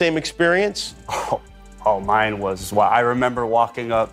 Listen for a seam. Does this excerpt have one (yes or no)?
no